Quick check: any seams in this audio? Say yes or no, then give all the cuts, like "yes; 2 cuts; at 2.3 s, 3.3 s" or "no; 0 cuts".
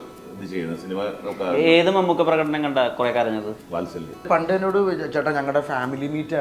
yes; 1 cut; at 4.3 s